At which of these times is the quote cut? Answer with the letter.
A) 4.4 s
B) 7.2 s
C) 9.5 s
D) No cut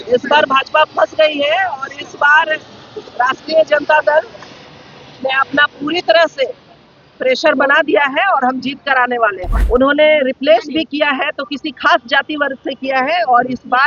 C